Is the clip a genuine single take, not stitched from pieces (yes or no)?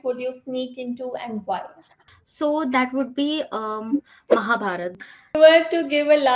no